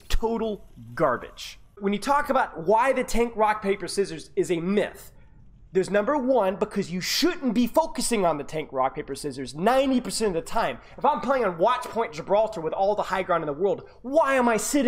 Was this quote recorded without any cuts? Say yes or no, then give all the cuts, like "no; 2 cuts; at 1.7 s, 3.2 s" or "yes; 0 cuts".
no; 1 cut; at 1.7 s